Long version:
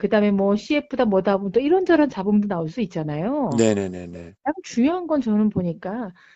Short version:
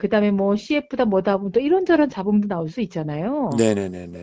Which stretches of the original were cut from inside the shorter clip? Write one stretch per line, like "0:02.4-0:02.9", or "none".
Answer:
none